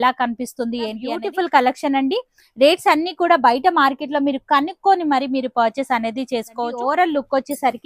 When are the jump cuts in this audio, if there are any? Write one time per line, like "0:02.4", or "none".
0:01.1
0:06.7

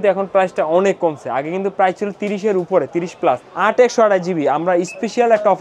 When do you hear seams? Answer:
0:03.5

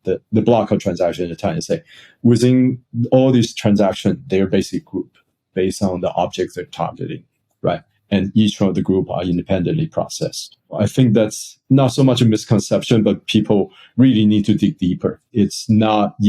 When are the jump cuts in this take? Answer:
0:10.7
0:15.2

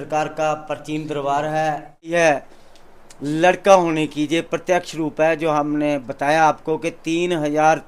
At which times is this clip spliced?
0:02.1

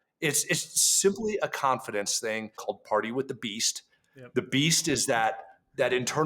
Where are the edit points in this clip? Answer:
0:02.5

